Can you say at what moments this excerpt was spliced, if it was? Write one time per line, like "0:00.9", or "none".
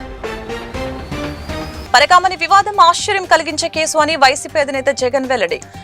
none

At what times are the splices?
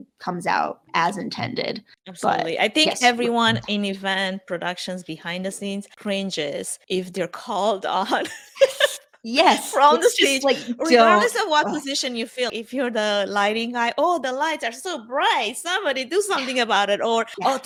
none

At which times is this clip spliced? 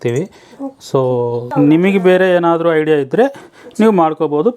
0:01.5

